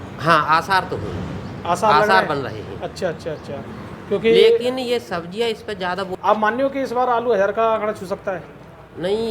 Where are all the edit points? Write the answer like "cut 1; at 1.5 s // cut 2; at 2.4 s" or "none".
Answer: cut 1; at 6.1 s